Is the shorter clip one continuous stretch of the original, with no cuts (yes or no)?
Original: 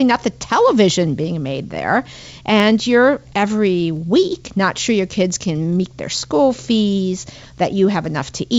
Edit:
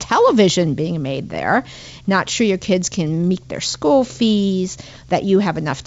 no